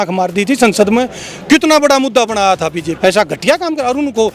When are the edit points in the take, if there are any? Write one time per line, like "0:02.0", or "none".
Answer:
0:03.0

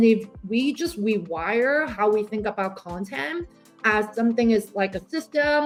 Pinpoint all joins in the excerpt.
none

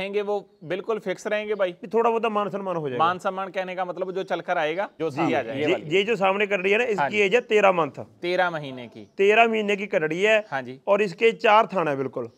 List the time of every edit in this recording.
0:05.5

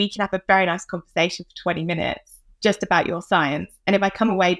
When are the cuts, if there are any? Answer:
none

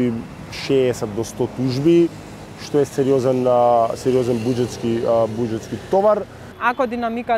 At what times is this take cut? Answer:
0:06.4

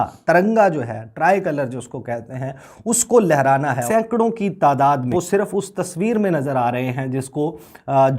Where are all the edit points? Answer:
0:03.8
0:05.1

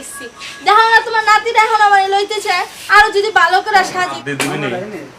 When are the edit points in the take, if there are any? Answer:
0:04.2

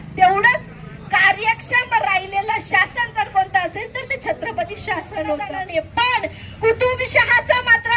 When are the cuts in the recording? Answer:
0:05.5

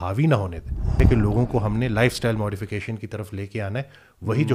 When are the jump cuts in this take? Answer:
0:01.0

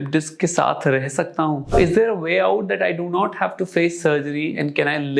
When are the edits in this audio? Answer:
0:01.7

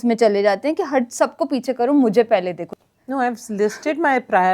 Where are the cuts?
0:02.6

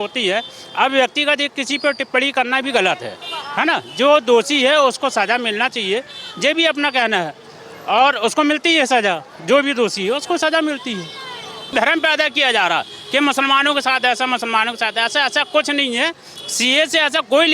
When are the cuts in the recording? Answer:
0:11.7

